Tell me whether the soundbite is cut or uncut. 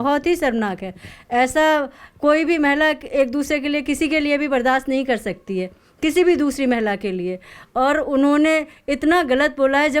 uncut